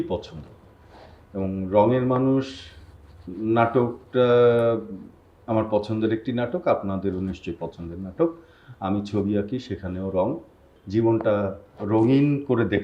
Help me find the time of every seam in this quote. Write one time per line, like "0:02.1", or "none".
0:10.7